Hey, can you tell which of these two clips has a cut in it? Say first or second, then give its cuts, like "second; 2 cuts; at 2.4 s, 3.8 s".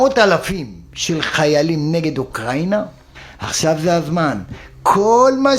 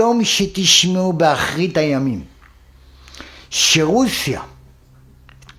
first; 1 cut; at 3.0 s